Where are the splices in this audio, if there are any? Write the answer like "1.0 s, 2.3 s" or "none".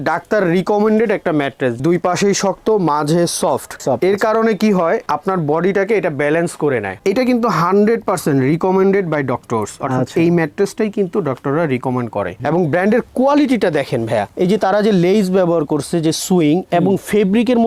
3.7 s, 7.0 s, 12.4 s